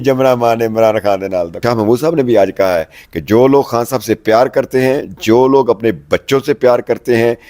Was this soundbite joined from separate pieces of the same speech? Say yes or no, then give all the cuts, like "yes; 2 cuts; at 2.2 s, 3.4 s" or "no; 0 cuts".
yes; 1 cut; at 1.6 s